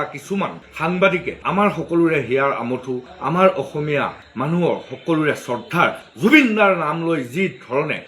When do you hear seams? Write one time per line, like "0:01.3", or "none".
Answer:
0:01.4